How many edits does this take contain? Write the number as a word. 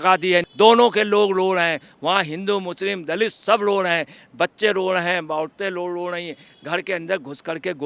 zero